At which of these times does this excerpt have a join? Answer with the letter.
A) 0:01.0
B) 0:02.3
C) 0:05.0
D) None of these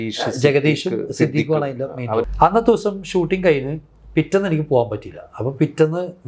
B